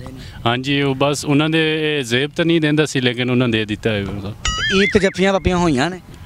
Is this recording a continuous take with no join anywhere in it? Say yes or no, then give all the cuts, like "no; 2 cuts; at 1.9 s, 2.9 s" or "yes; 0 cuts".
yes; 0 cuts